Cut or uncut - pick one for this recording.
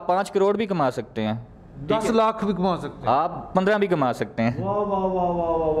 uncut